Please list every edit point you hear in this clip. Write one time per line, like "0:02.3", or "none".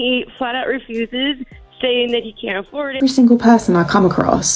0:03.0